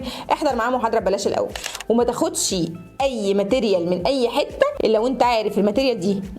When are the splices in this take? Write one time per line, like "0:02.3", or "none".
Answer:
0:01.7
0:04.7